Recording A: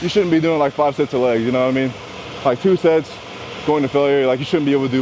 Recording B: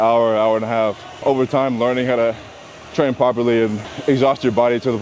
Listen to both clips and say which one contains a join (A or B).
B